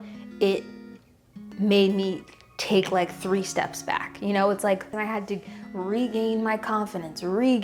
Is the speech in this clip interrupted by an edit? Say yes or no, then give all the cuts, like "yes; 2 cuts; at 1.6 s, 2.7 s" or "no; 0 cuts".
no; 0 cuts